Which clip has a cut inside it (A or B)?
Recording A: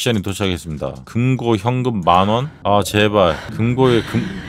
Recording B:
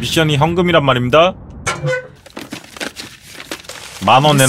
A